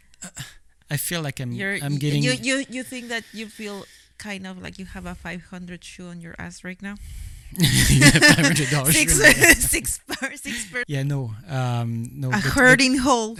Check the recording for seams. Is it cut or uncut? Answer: uncut